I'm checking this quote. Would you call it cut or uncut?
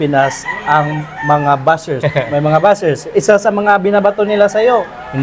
cut